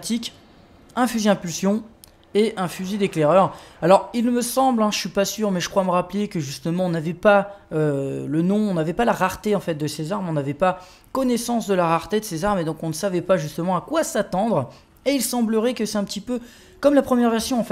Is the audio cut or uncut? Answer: uncut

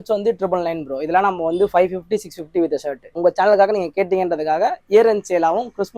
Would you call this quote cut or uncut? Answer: cut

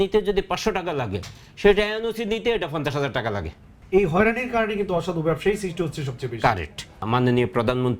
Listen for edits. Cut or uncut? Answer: cut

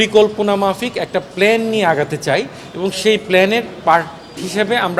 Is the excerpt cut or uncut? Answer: uncut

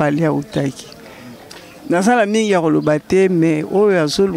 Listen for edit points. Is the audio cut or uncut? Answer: uncut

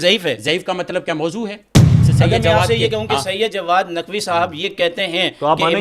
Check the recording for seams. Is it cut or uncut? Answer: cut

